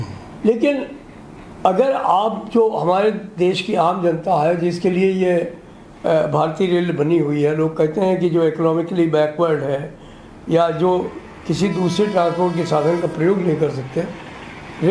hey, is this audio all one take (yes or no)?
yes